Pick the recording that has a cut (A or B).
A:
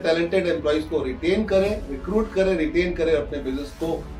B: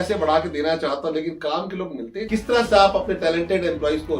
B